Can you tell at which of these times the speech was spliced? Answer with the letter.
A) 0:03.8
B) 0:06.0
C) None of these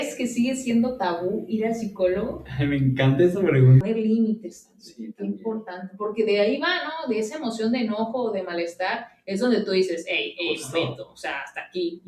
A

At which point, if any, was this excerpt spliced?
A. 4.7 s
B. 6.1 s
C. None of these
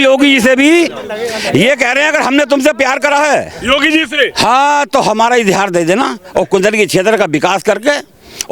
C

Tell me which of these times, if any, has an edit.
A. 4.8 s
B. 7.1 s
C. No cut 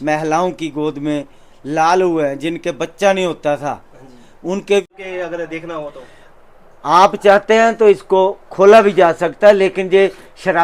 A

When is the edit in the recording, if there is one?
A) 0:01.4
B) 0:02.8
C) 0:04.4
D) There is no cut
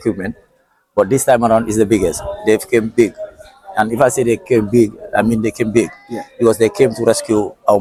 D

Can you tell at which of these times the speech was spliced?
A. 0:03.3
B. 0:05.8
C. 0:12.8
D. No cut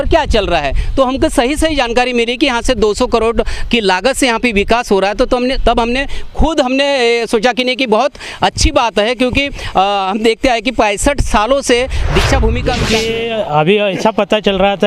C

